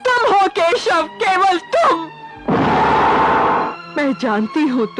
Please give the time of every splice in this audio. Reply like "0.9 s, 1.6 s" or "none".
3.7 s